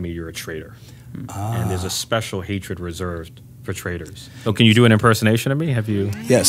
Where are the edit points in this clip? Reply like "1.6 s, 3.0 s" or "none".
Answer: 4.3 s